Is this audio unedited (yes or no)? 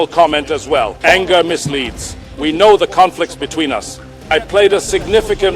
no